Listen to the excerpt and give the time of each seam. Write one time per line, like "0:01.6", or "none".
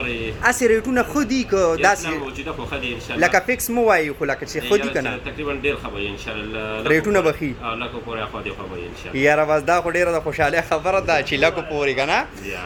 none